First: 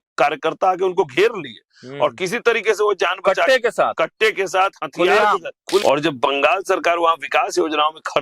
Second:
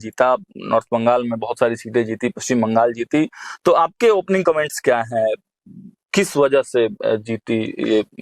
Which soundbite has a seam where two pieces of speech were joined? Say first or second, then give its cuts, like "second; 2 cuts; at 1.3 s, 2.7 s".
first; 1 cut; at 5.8 s